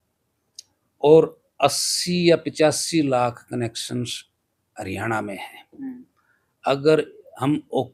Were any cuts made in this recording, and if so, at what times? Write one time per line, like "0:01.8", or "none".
none